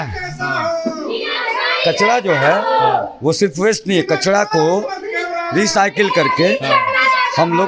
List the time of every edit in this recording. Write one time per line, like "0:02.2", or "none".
none